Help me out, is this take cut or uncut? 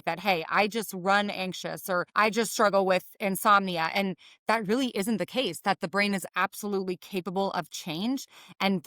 cut